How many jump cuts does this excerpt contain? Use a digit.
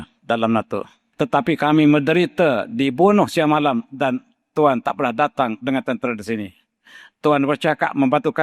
1